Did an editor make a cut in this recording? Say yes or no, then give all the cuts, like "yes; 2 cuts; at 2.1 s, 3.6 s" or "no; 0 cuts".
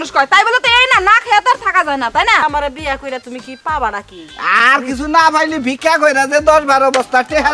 yes; 1 cut; at 2.4 s